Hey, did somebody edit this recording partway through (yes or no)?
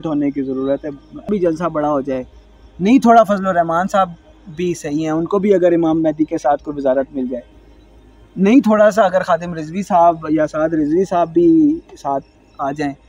yes